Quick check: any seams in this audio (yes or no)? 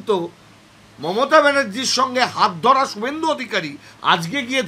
no